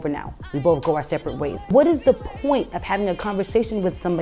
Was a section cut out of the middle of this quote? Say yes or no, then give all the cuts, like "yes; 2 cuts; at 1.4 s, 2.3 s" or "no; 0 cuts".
yes; 1 cut; at 1.7 s